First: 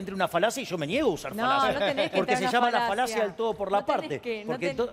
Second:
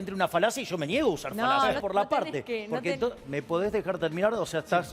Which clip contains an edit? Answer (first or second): second